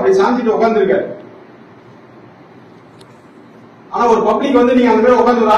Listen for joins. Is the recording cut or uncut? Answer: uncut